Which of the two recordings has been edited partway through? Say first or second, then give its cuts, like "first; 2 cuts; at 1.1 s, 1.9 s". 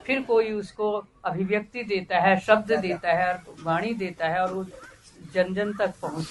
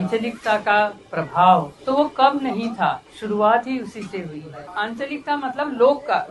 second; 3 cuts; at 1.7 s, 3.1 s, 4.6 s